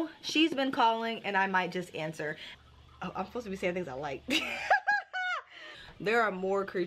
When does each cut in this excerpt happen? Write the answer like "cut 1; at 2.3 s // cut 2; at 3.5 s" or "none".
cut 1; at 2.5 s // cut 2; at 5.8 s